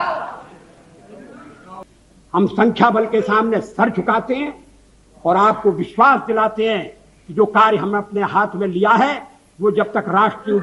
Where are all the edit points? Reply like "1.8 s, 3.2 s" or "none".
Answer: 1.8 s